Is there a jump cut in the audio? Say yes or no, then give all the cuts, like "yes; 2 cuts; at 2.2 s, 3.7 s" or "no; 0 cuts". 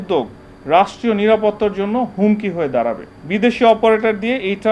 yes; 1 cut; at 3.1 s